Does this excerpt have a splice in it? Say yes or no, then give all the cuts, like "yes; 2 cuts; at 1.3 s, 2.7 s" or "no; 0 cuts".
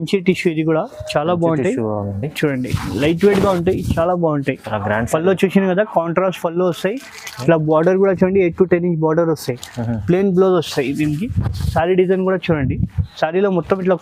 no; 0 cuts